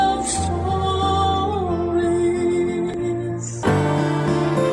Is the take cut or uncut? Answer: cut